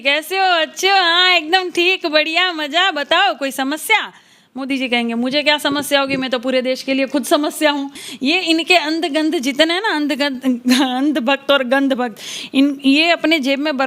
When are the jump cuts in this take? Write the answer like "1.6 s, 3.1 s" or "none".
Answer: 8.0 s